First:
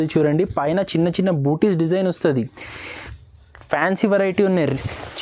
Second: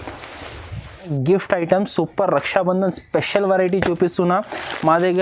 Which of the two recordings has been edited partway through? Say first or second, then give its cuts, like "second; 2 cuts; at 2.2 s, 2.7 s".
second; 1 cut; at 1.1 s